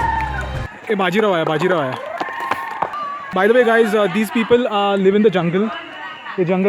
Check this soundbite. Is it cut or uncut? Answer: cut